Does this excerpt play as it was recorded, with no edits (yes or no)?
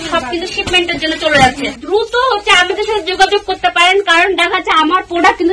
no